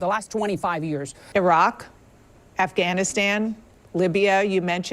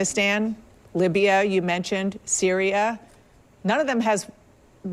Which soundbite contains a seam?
first; 1 cut; at 1.1 s

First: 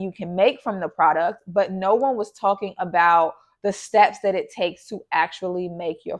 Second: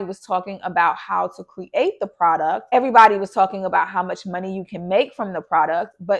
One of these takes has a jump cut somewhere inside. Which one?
second; 1 cut; at 2.7 s

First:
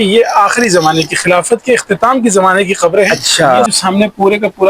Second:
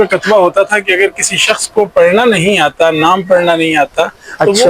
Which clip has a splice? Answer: first; 1 cut; at 3.7 s

